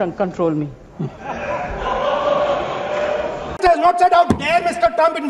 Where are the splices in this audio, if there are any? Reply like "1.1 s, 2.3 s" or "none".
none